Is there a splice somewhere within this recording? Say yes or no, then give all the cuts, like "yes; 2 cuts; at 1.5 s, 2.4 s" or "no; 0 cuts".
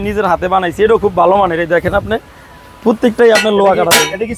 no; 0 cuts